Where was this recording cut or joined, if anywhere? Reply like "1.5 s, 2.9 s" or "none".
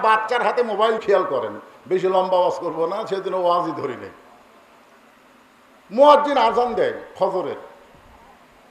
1.0 s